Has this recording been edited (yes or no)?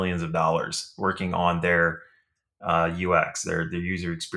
no